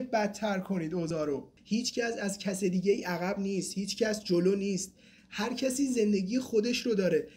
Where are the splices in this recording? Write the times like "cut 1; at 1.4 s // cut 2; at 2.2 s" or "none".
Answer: cut 1; at 1.3 s

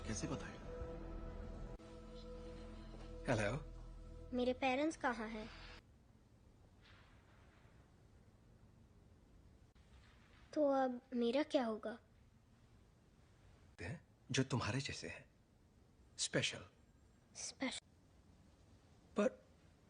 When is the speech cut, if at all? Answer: cut 1; at 5.8 s

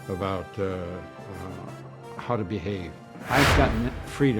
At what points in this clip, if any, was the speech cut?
cut 1; at 3.1 s

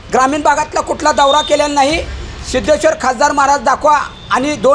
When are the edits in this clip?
none

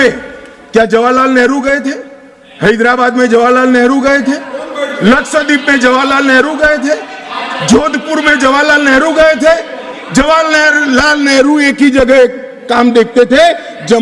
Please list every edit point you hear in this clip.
none

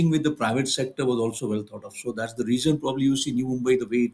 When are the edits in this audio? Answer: none

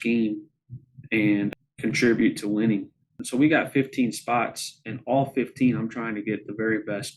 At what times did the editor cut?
cut 1; at 1.5 s // cut 2; at 3.2 s

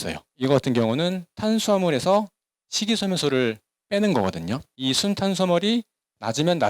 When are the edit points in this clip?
cut 1; at 4.7 s

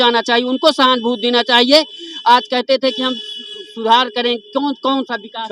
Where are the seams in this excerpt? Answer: none

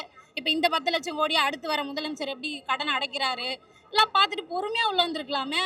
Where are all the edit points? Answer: none

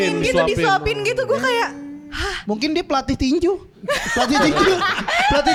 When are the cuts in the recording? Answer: none

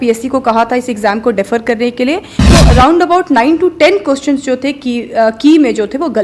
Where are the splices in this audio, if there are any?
cut 1; at 2.3 s

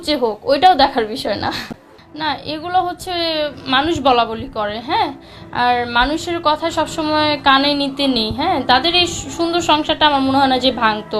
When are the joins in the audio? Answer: cut 1; at 1.6 s

